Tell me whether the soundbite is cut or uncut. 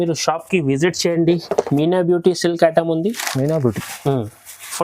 cut